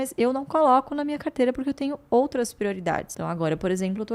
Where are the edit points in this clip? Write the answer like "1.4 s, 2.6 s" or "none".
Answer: 3.1 s